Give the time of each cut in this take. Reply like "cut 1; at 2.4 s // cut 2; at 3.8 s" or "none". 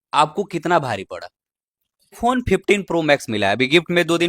cut 1; at 2.2 s